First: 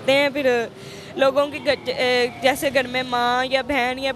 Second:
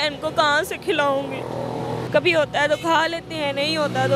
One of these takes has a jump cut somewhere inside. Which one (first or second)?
second